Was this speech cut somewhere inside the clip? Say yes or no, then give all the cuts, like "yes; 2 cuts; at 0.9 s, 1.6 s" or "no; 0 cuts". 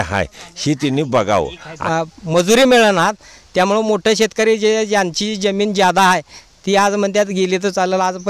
yes; 1 cut; at 1.8 s